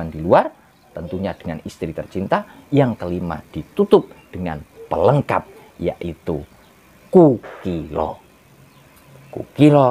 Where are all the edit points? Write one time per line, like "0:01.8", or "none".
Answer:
none